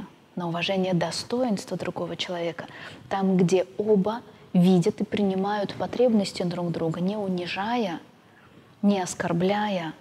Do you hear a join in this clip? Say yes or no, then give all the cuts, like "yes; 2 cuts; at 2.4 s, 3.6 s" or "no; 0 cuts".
no; 0 cuts